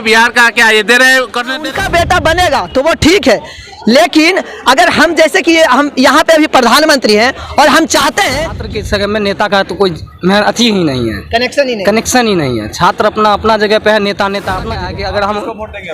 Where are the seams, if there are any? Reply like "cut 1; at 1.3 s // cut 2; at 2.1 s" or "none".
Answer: cut 1; at 1.6 s // cut 2; at 8.6 s // cut 3; at 14.6 s